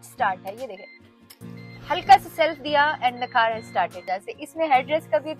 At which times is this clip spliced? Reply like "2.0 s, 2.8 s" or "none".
4.0 s